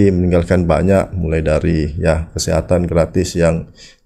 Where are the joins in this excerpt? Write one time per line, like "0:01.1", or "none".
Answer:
none